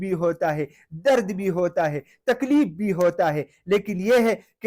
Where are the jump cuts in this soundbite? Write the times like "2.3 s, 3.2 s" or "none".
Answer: none